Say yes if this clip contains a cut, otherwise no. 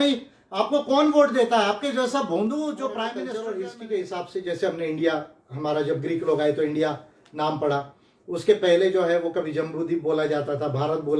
yes